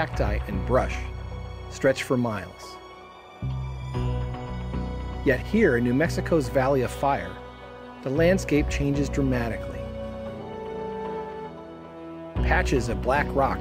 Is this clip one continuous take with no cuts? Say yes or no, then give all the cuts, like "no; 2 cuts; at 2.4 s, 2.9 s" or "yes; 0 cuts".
yes; 0 cuts